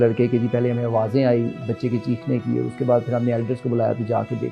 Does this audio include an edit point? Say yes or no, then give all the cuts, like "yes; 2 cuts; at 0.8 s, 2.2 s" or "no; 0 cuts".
no; 0 cuts